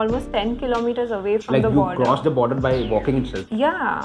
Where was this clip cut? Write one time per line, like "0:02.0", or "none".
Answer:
none

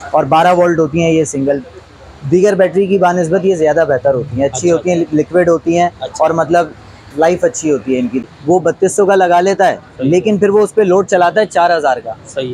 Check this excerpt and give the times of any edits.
0:08.2

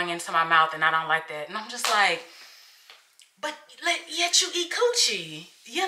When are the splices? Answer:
none

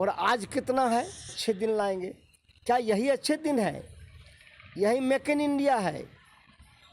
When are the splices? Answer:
0:01.4

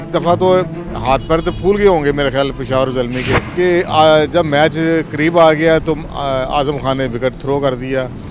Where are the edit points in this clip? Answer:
0:03.4

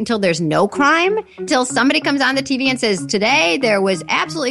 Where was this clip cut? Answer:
0:01.5

